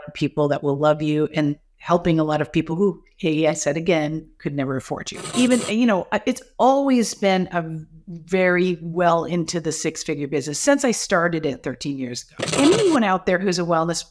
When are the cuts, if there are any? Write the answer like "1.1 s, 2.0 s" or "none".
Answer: 5.3 s, 12.5 s